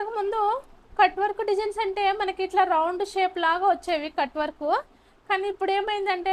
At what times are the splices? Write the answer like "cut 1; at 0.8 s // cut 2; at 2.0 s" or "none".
none